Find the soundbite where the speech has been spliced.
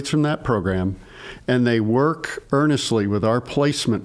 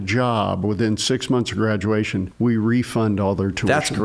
second; 1 cut; at 2.3 s

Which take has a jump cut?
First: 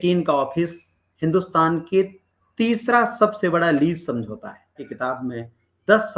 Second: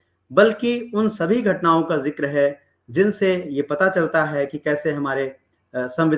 first; 1 cut; at 4.9 s

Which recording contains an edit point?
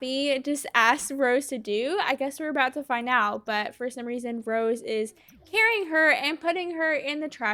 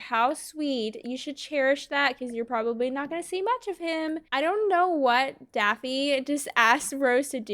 second; 1 cut; at 4.2 s

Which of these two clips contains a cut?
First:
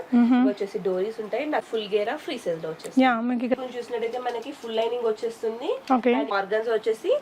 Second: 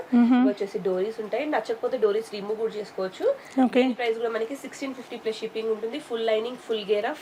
first; 3 cuts; at 1.6 s, 3.5 s, 6.3 s

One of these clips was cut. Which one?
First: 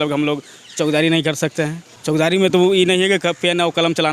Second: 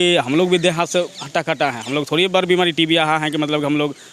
first; 1 cut; at 1.9 s

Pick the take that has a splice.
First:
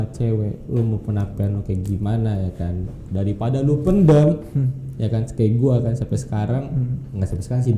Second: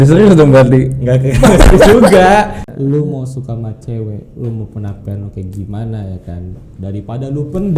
second; 1 cut; at 2.6 s

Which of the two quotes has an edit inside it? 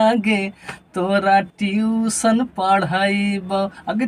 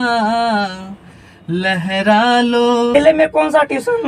second; 1 cut; at 2.9 s

